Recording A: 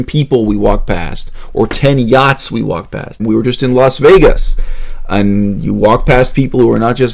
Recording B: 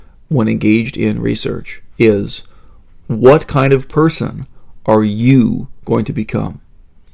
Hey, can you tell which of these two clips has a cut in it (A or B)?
A